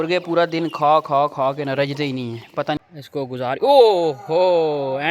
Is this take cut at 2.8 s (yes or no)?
yes